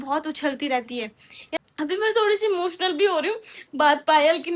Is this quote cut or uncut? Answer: cut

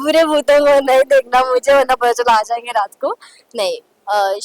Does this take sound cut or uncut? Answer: uncut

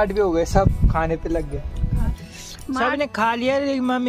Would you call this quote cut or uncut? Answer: cut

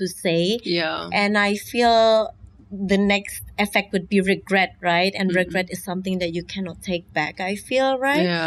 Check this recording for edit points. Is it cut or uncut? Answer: uncut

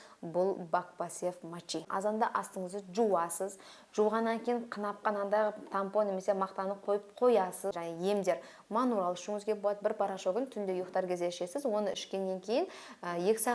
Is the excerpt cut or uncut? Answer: cut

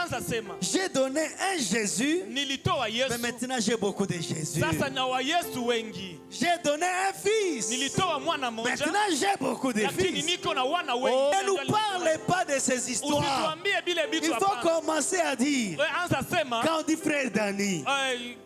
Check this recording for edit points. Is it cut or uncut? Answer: uncut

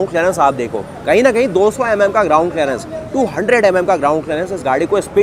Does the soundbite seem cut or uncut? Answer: uncut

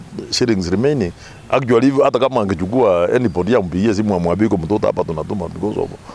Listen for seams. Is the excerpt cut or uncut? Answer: uncut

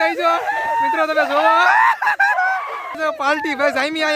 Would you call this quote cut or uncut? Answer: cut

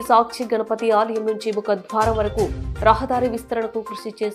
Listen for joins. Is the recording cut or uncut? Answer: uncut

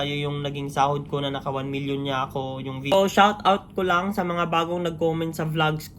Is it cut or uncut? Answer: cut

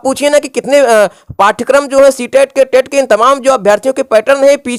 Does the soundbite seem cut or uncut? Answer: uncut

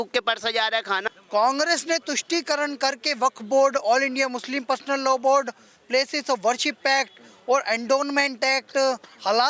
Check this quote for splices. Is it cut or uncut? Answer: cut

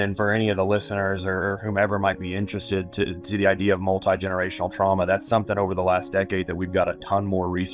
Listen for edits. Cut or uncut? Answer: uncut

